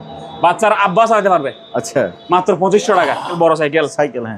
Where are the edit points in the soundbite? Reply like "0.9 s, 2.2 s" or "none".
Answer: 3.4 s